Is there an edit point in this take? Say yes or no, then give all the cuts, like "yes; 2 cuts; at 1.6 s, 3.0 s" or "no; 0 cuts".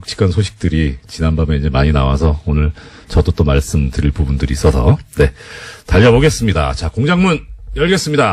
yes; 1 cut; at 5.5 s